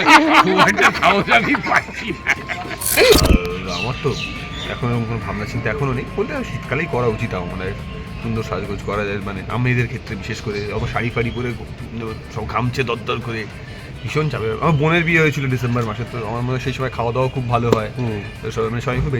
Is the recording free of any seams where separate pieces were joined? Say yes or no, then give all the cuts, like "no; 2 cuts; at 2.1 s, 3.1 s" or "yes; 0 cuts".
no; 1 cut; at 3.1 s